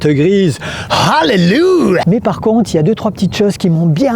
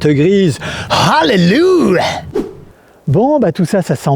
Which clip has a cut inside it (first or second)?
first